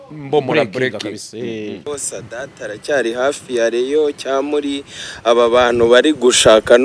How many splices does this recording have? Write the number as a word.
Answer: one